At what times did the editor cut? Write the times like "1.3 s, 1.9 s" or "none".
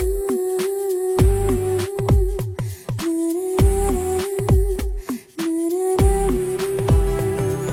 none